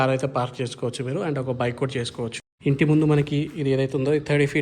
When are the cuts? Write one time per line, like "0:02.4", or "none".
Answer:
0:02.4